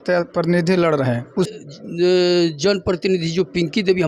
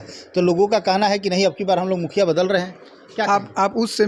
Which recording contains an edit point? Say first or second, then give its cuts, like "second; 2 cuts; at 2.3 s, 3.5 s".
first; 1 cut; at 1.5 s